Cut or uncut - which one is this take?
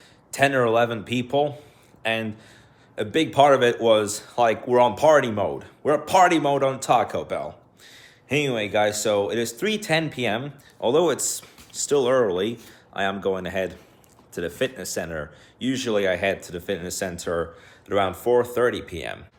uncut